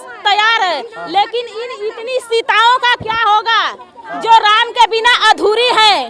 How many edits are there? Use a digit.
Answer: 0